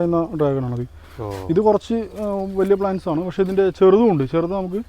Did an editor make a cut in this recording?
no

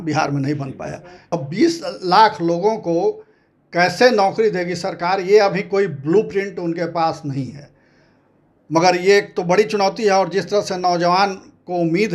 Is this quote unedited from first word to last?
no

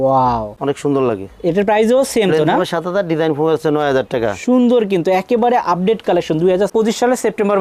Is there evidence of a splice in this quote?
no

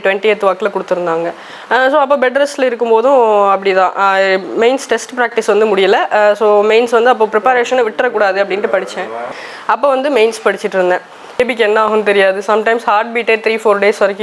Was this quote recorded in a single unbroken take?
yes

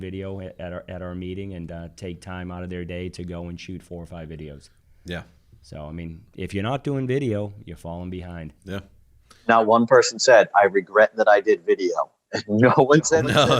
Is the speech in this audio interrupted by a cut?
no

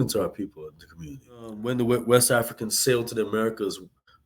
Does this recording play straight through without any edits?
no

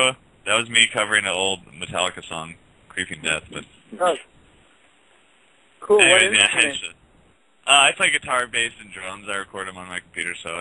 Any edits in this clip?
no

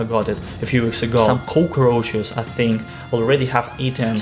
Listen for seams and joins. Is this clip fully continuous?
yes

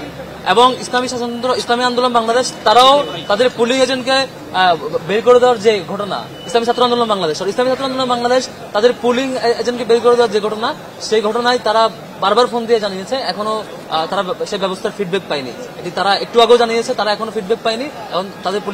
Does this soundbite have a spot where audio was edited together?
no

